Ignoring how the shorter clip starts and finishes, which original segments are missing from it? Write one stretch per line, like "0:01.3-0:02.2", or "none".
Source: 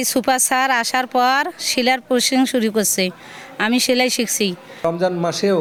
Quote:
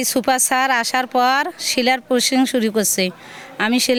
none